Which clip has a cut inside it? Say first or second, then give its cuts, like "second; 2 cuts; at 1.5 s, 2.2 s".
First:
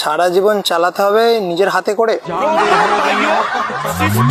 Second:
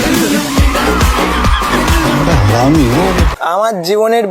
second; 1 cut; at 3.3 s